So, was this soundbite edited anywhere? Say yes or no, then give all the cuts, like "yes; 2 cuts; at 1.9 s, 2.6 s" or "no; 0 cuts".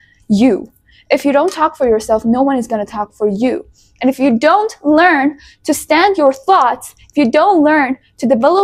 no; 0 cuts